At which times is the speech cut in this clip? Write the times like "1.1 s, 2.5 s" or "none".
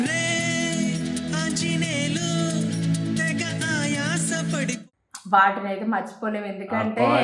4.9 s